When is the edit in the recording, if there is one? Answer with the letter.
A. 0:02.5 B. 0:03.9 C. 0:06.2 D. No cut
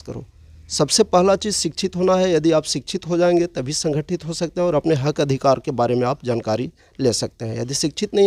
D